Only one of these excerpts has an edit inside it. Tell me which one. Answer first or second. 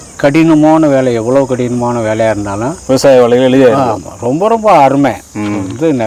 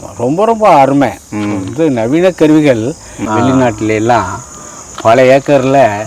second